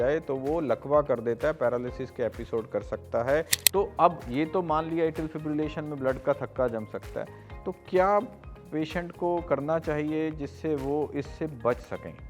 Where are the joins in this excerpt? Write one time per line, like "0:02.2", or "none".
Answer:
0:03.6